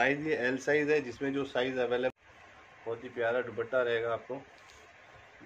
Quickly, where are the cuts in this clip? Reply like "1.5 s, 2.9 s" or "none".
2.1 s